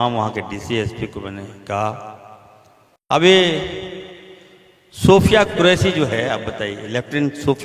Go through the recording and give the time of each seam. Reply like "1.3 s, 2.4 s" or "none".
3.1 s